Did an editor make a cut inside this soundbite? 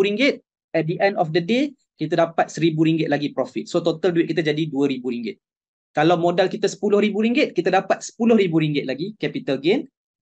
no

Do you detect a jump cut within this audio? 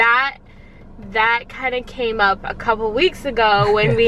no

